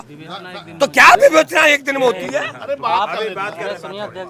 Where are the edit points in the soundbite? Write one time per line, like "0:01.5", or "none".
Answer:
none